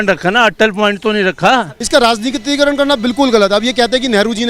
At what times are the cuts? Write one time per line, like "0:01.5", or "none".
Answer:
0:01.8

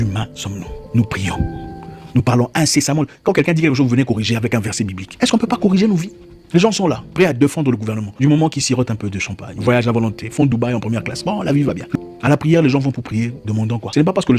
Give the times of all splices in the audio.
0:11.8

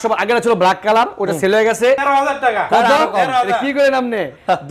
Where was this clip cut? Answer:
0:02.0

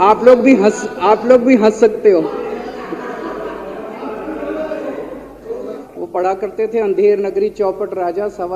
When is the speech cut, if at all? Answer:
0:05.8

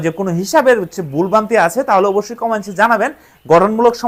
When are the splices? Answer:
none

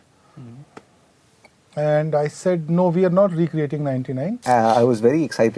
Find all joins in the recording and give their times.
0:04.4

